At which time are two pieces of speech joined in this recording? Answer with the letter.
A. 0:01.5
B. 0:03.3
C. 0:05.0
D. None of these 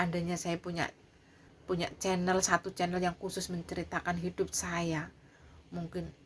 A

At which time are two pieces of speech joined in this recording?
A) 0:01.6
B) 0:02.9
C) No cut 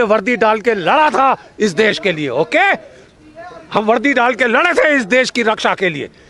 C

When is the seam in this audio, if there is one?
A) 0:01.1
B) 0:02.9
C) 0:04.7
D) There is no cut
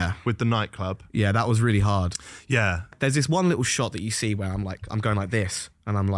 B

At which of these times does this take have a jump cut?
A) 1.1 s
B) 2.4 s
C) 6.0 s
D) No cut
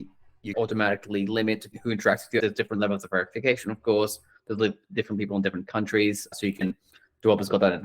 B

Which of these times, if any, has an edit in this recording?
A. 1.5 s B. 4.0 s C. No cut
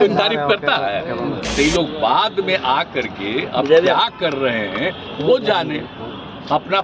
A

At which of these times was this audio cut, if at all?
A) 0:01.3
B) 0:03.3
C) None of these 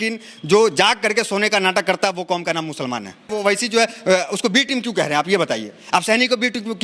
B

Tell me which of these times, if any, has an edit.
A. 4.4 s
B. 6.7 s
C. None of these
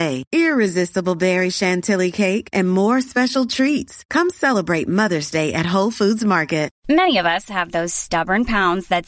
B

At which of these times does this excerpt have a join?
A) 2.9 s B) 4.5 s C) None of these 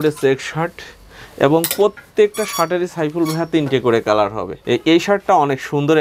B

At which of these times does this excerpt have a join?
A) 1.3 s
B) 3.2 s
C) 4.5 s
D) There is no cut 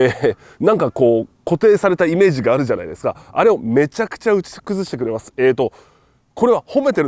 D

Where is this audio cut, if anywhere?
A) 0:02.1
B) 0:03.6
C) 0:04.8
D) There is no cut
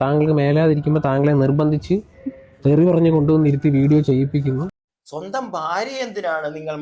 C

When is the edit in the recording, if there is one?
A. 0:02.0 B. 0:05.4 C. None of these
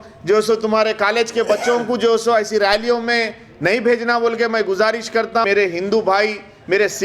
B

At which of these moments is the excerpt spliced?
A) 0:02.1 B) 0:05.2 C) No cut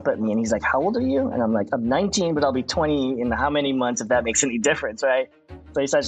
C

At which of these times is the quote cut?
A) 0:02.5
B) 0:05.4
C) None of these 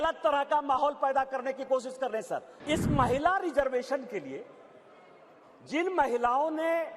A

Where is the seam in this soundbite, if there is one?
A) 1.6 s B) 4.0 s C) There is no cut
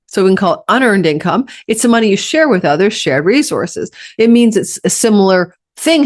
B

